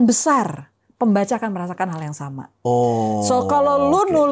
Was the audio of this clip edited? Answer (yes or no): no